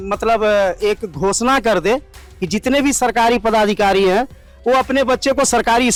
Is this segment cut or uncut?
uncut